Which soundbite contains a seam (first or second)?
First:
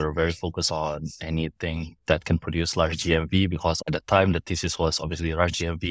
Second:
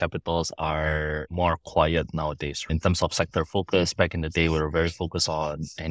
second